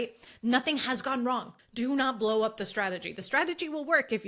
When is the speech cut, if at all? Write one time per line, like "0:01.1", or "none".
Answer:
0:01.6